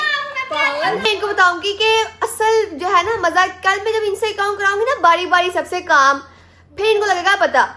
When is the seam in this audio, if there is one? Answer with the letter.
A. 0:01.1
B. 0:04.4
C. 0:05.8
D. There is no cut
A